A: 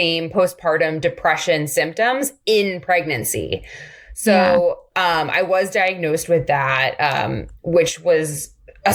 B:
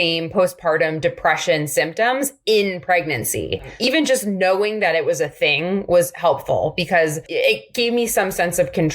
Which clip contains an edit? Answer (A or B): B